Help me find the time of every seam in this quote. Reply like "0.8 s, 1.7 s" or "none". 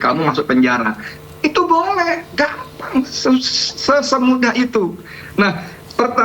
none